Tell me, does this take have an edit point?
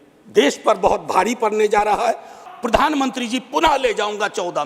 yes; 1 cut; at 2.4 s

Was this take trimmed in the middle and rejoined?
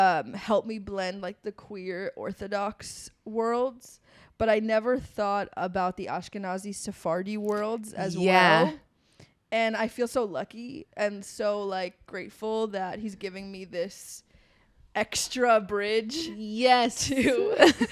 no; 0 cuts

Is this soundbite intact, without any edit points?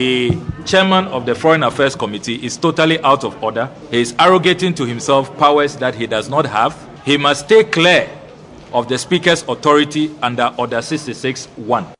no; 2 cuts; at 3.7 s, 6.9 s

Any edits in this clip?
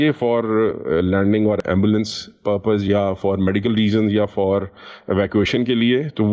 yes; 1 cut; at 1.6 s

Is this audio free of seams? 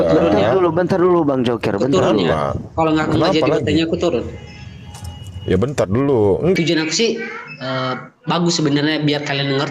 no; 1 cut; at 6.5 s

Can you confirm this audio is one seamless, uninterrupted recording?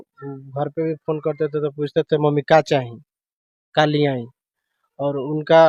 yes; 0 cuts

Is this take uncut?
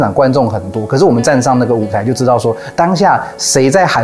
yes; 0 cuts

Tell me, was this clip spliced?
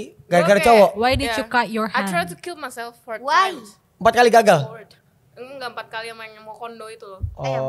no; 0 cuts

